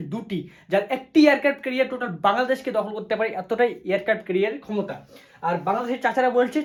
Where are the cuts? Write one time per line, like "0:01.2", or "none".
none